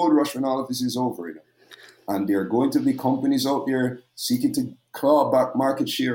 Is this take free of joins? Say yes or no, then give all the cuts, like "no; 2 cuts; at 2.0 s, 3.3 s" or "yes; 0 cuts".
yes; 0 cuts